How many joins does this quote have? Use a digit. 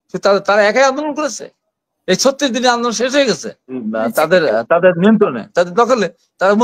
1